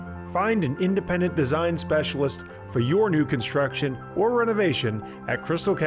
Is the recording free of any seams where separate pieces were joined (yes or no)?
yes